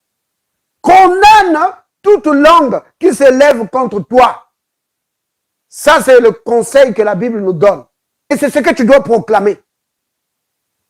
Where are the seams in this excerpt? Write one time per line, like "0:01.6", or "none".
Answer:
0:08.3